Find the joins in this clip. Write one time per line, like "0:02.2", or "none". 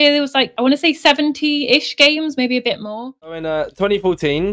0:03.4